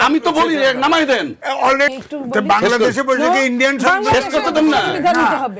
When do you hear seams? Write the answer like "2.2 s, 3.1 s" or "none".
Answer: 2.0 s